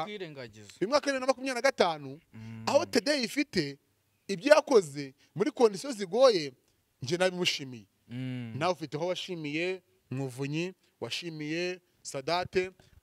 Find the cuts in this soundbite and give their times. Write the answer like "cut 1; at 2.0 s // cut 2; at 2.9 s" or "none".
none